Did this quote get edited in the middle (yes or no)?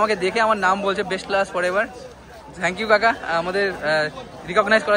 no